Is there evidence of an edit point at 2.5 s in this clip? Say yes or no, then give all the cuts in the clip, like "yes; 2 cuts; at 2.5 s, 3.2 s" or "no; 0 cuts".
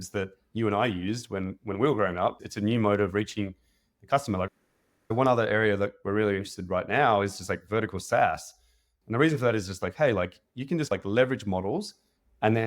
yes; 2 cuts; at 2.5 s, 4.5 s